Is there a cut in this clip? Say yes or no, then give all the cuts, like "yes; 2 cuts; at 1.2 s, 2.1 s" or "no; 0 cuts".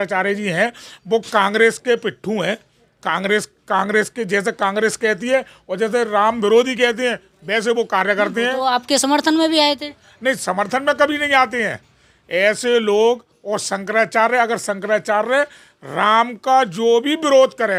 no; 0 cuts